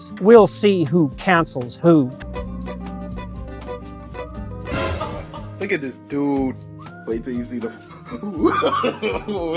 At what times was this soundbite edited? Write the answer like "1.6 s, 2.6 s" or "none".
none